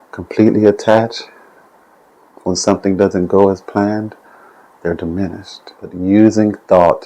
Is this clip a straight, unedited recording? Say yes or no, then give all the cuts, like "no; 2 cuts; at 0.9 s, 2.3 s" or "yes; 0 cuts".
no; 1 cut; at 6.0 s